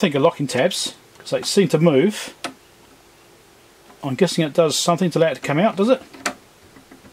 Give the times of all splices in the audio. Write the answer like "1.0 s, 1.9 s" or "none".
none